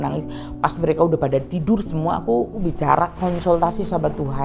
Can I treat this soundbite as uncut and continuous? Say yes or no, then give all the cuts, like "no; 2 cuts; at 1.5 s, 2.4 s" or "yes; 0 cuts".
no; 1 cut; at 2.5 s